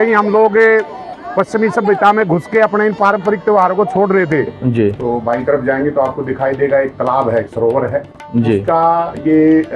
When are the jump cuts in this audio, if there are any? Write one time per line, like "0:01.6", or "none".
0:04.6